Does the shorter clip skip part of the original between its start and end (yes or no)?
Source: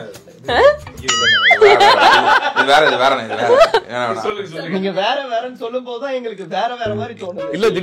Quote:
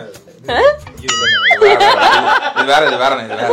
no